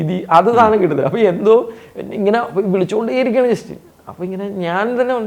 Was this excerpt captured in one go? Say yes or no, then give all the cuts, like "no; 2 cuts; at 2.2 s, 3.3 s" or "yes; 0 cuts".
yes; 0 cuts